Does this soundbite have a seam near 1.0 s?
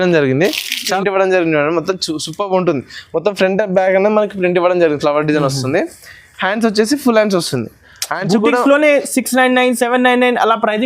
yes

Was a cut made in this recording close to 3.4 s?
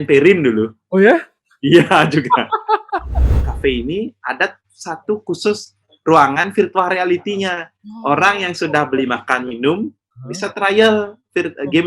yes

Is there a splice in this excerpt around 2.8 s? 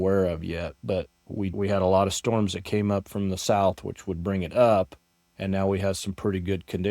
no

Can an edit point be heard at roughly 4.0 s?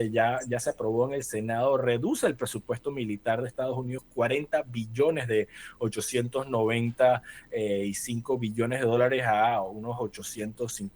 yes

